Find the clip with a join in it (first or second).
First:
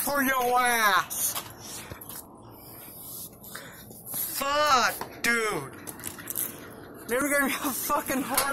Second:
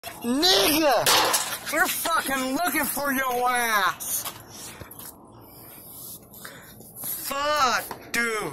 first